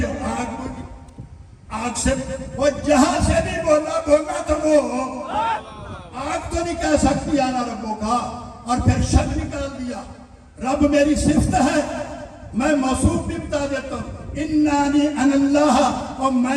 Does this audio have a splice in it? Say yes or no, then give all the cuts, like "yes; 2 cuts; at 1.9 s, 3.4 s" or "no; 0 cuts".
no; 0 cuts